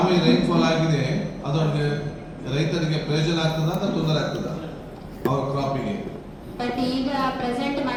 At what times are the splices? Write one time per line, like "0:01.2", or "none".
none